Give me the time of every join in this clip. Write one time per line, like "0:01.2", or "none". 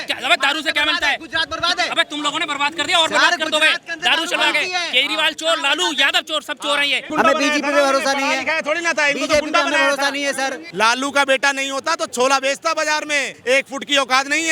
0:07.1
0:10.6
0:13.3